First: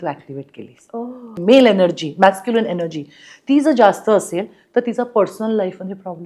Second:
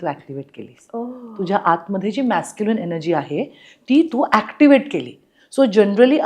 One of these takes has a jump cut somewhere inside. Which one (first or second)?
first